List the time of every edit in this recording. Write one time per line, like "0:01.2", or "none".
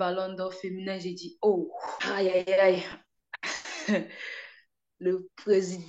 0:01.9

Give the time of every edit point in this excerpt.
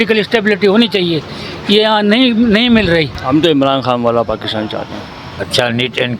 0:03.2
0:05.5

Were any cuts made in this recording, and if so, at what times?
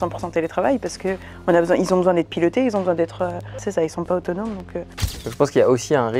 0:03.5
0:04.8

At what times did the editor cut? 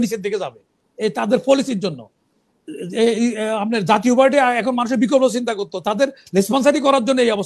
none

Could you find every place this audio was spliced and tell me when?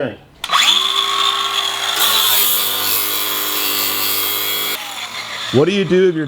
0:04.8

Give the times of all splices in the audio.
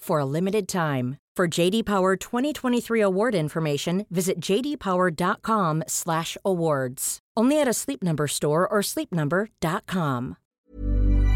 0:10.4

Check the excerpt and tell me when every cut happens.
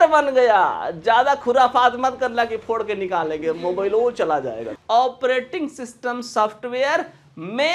0:04.7

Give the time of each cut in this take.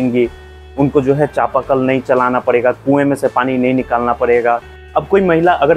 0:04.8

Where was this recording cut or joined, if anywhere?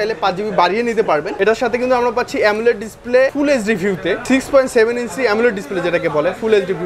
0:01.3
0:04.2

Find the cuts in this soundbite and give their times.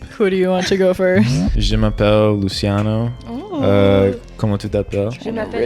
0:01.4

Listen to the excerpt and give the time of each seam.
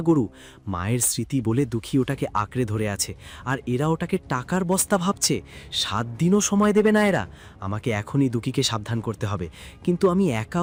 none

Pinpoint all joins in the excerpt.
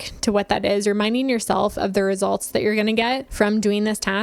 0:03.3

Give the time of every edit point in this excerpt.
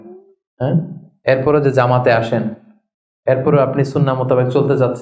none

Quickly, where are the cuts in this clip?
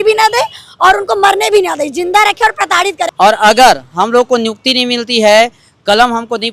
0:03.1

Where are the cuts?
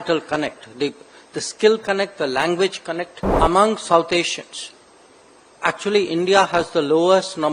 0:03.3

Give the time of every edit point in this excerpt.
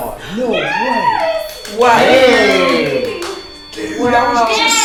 none

